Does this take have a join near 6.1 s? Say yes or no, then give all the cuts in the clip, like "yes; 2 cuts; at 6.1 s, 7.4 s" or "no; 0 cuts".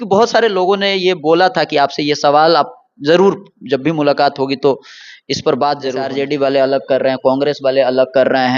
yes; 1 cut; at 6.1 s